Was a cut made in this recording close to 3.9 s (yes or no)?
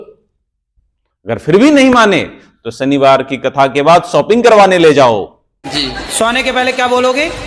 no